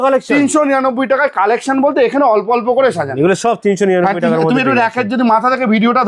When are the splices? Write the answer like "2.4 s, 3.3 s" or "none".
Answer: none